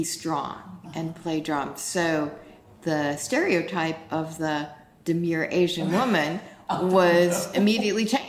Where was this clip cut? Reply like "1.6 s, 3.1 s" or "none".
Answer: none